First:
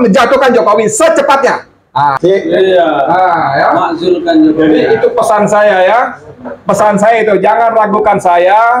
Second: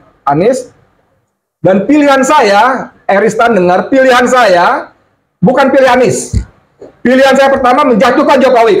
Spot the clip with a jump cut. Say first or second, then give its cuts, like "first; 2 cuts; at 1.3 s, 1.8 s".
first; 1 cut; at 2.2 s